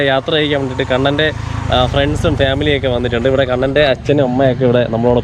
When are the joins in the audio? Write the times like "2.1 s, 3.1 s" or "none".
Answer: none